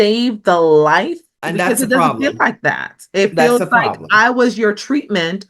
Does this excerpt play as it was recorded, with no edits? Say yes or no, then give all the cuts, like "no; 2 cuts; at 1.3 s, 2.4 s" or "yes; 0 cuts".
no; 1 cut; at 1.4 s